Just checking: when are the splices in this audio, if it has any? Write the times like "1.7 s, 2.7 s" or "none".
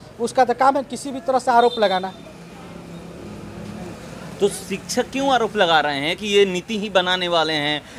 none